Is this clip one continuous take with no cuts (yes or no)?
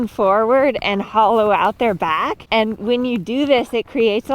no